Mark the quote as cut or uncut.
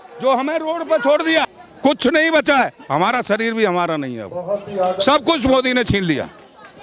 cut